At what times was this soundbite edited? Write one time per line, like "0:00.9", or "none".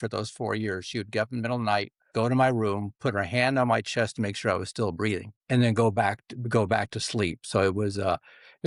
none